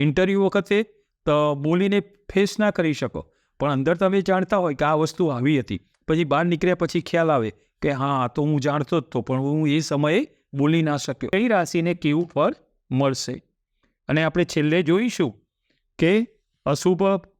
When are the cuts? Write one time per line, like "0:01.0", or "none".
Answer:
0:11.3